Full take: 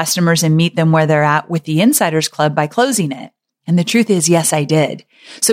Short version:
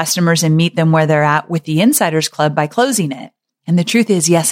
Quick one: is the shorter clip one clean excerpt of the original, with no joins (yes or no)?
yes